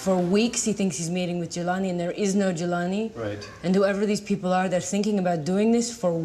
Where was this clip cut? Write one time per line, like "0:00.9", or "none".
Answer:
0:04.8